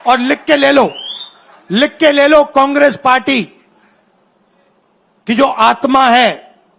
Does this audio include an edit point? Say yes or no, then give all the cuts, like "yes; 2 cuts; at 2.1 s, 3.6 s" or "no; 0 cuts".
no; 0 cuts